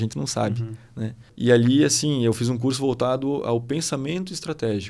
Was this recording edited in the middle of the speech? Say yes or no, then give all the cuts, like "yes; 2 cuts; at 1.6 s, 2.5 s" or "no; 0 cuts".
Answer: yes; 1 cut; at 1.2 s